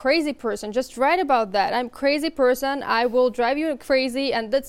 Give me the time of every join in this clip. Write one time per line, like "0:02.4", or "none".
none